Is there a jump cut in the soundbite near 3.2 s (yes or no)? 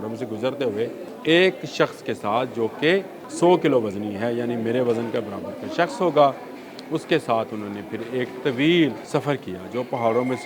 yes